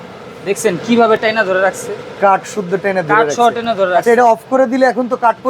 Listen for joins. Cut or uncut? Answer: uncut